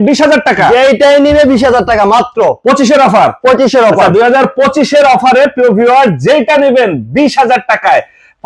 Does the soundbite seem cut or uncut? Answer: uncut